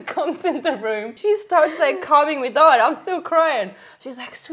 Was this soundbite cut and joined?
yes; 1 cut; at 1.1 s

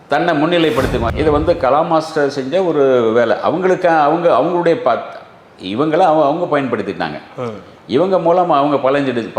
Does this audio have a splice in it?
yes; 1 cut; at 1.1 s

